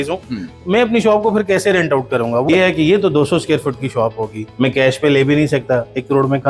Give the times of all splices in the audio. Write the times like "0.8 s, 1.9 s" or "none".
2.4 s, 4.4 s